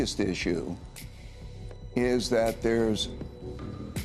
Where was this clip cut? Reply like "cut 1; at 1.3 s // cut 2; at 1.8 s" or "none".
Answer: none